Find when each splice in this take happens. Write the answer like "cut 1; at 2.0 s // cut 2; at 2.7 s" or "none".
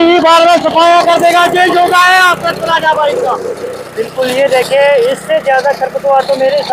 none